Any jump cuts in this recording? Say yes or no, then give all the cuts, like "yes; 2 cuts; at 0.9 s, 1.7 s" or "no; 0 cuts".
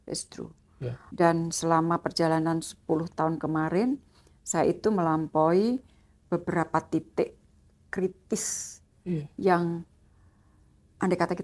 yes; 1 cut; at 1.0 s